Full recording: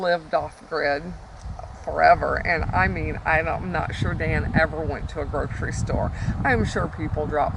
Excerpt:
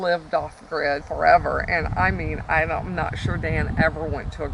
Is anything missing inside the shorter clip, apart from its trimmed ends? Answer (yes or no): yes